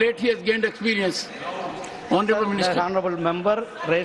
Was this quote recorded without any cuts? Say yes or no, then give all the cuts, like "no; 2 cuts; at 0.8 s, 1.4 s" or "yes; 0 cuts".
yes; 0 cuts